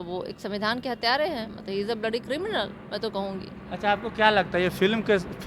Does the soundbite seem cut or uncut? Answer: uncut